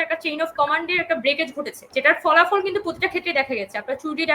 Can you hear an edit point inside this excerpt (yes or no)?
yes